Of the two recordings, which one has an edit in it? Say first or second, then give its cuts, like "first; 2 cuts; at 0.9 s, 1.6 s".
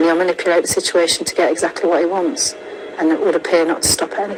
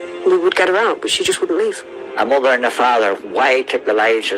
second; 1 cut; at 1.9 s